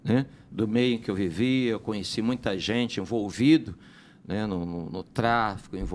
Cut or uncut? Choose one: uncut